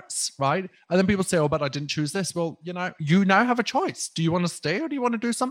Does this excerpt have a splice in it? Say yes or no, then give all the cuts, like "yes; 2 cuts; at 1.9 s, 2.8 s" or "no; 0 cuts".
no; 0 cuts